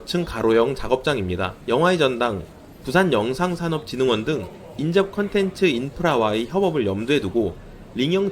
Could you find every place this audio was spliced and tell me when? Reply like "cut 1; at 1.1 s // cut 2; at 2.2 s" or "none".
none